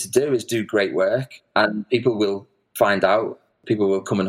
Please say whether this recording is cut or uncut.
cut